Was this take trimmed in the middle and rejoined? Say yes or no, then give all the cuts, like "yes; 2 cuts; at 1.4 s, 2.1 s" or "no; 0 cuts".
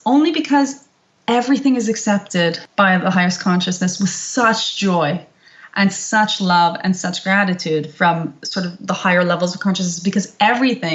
yes; 1 cut; at 2.6 s